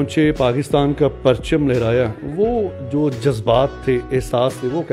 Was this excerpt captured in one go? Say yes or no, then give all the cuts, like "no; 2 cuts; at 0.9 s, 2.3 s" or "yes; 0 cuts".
yes; 0 cuts